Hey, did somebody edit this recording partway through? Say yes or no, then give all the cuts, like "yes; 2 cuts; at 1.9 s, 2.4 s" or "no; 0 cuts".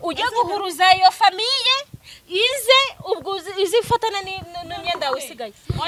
no; 0 cuts